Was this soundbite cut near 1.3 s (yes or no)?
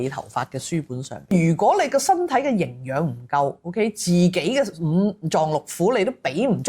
yes